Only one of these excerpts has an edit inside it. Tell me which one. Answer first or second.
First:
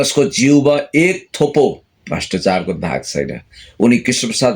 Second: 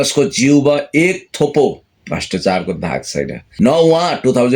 second